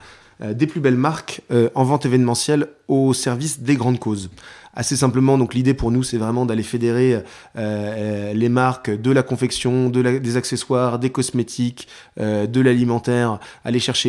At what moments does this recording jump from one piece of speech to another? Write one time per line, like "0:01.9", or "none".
none